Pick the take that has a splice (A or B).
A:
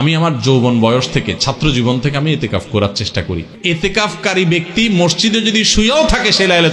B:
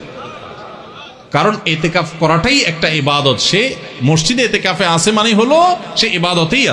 A